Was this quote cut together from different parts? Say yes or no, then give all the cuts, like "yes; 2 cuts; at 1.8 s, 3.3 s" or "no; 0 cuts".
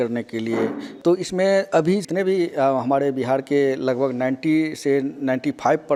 no; 0 cuts